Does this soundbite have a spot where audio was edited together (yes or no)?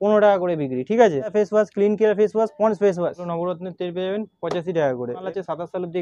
yes